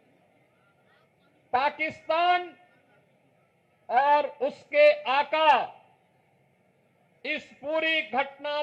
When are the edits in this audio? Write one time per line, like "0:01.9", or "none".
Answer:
none